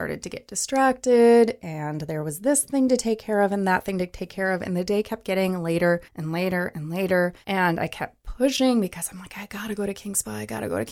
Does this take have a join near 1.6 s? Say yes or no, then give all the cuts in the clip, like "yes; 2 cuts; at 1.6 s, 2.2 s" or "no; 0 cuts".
no; 2 cuts; at 6.2 s, 7.4 s